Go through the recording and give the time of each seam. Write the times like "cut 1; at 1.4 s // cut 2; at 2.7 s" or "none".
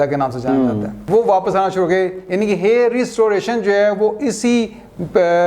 cut 1; at 1.0 s